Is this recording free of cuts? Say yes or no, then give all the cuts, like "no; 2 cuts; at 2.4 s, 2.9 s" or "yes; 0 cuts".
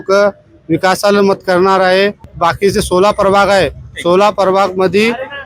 no; 1 cut; at 2.2 s